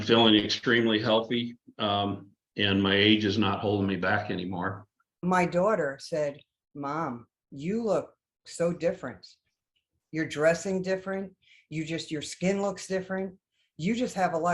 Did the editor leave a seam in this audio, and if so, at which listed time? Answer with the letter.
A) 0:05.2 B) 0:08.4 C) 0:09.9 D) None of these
A